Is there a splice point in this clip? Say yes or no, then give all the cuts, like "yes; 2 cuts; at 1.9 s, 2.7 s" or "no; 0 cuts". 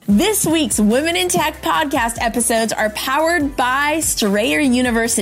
no; 0 cuts